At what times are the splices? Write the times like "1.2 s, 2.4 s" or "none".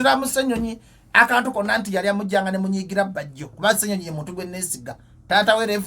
none